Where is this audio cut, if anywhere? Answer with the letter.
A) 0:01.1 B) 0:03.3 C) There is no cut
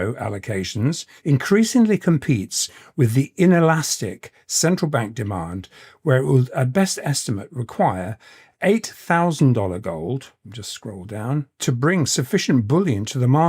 A